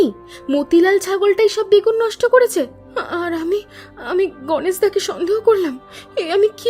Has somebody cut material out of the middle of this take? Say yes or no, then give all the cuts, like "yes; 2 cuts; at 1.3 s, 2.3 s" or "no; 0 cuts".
no; 0 cuts